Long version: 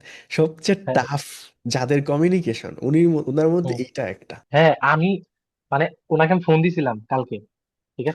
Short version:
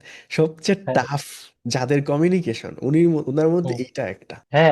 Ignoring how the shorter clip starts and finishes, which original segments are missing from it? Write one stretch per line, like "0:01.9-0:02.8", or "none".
none

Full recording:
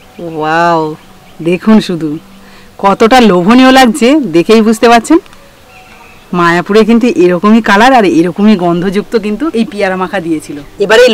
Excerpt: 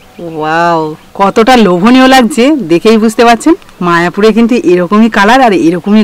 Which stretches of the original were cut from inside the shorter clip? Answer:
0:01.0-0:02.7
0:05.3-0:06.2

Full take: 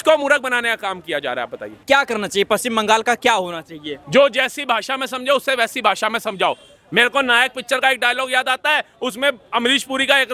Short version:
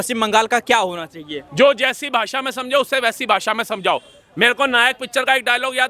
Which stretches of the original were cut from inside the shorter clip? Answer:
none

